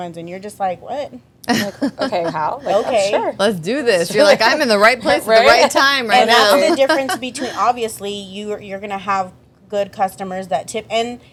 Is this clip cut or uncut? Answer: uncut